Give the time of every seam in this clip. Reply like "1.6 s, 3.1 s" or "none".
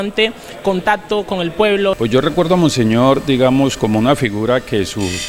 2.0 s